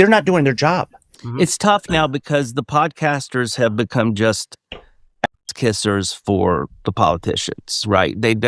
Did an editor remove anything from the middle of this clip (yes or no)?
yes